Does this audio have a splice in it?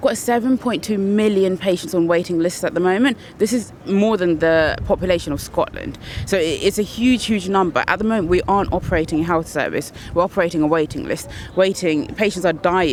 no; 0 cuts

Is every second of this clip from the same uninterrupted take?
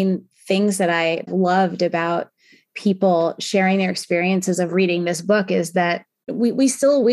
no; 1 cut; at 1.3 s

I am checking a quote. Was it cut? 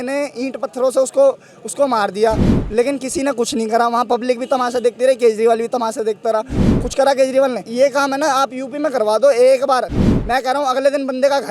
yes; 1 cut; at 7.6 s

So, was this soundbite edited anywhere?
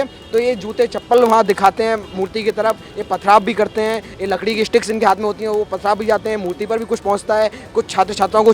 no; 0 cuts

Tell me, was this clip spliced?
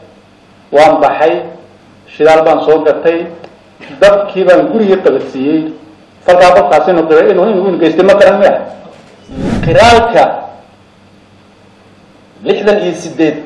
yes; 1 cut; at 9.5 s

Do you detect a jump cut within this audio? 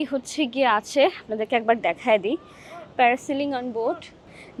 no; 0 cuts

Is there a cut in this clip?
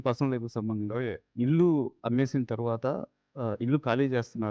yes; 1 cut; at 1.2 s

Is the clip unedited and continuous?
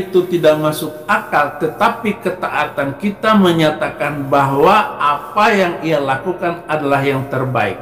yes; 0 cuts

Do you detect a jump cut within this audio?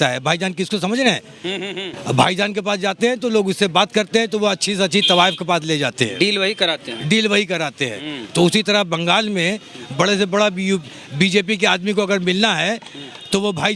no; 0 cuts

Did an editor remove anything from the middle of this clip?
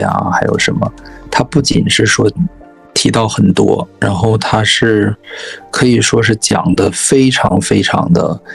no; 0 cuts

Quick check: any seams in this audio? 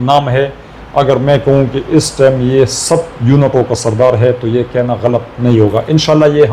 no; 0 cuts

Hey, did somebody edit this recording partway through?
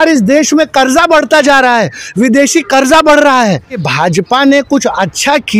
yes; 1 cut; at 3.9 s

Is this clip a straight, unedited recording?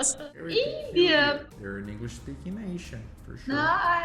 no; 1 cut; at 1.4 s

